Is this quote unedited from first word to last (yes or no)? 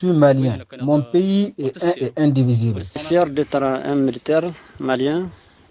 no